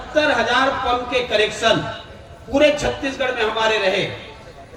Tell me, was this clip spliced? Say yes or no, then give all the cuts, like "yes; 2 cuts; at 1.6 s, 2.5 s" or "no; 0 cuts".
no; 0 cuts